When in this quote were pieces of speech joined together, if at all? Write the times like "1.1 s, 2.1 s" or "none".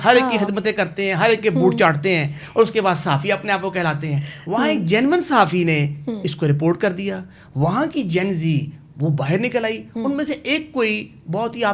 none